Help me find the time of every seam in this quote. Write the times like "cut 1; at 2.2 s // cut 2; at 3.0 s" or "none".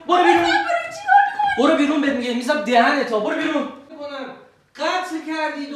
cut 1; at 3.9 s